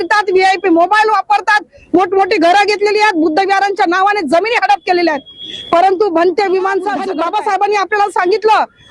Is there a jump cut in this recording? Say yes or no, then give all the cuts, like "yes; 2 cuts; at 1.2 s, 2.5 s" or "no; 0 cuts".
yes; 1 cut; at 7.0 s